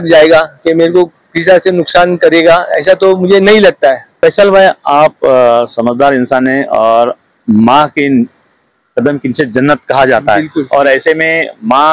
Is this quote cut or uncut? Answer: cut